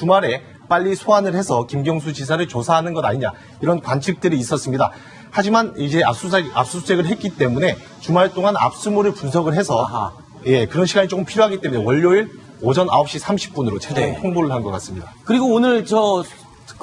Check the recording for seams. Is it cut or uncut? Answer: cut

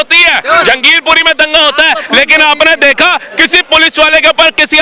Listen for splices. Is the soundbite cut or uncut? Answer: uncut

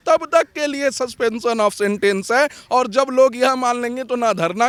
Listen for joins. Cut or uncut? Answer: uncut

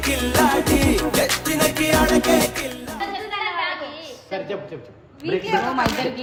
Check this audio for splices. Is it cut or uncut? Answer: uncut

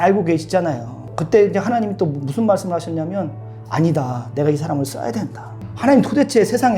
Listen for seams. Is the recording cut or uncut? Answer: cut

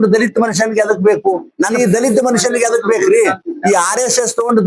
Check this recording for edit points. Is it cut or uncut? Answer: cut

